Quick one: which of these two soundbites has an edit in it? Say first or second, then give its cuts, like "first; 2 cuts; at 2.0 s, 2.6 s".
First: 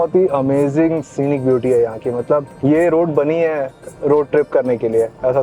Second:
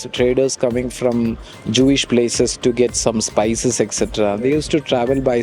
first; 1 cut; at 2.5 s